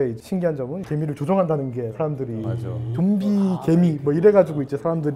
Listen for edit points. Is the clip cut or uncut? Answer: uncut